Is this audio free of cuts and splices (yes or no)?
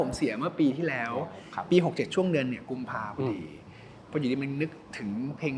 yes